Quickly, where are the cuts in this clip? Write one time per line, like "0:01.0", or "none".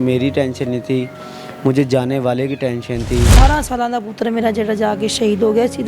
0:03.3

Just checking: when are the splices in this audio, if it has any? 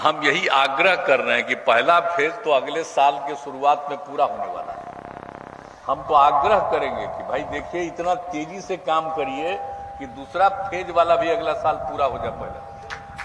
none

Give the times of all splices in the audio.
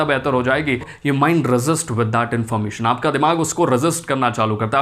0:00.9

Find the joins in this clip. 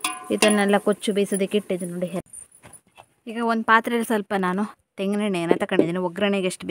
0:02.2

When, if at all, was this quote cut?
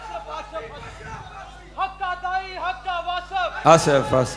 none

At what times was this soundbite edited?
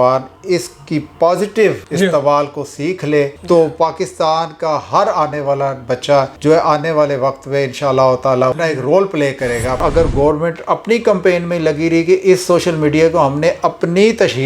0:08.5
0:09.8

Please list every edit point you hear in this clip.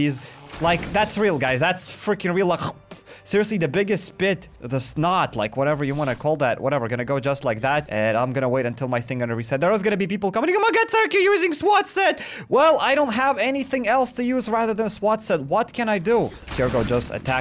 none

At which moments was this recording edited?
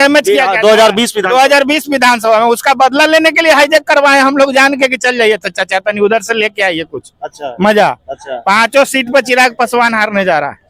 none

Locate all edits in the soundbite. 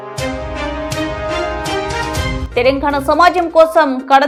none

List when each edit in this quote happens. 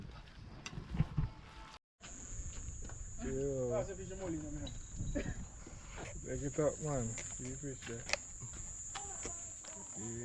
0:01.7

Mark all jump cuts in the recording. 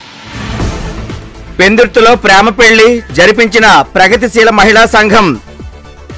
0:00.9

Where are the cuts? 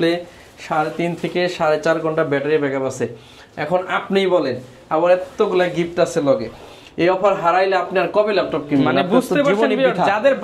none

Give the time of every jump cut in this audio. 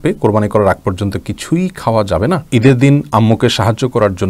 0:02.4

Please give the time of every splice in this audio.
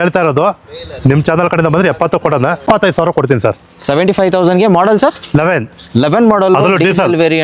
0:02.6

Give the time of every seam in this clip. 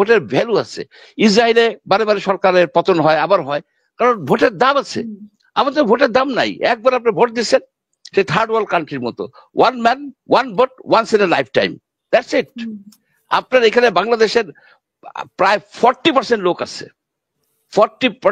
none

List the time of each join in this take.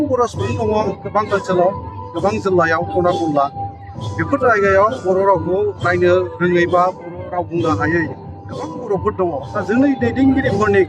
0:09.5

